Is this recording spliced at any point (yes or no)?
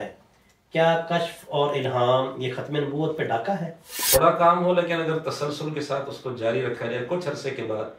yes